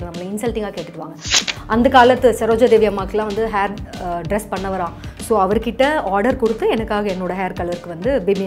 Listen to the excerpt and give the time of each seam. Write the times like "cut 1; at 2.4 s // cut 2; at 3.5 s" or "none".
cut 1; at 1.3 s